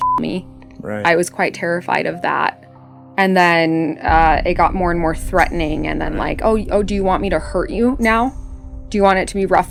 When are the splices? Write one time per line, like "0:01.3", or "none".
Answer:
none